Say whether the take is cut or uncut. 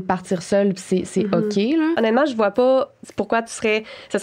cut